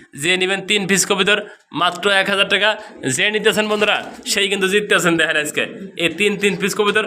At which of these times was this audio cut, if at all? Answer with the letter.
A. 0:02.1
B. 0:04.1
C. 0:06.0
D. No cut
D